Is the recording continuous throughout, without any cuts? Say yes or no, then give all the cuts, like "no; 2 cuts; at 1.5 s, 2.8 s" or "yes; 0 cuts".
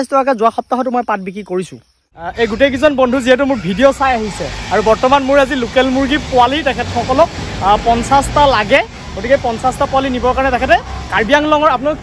no; 1 cut; at 2.3 s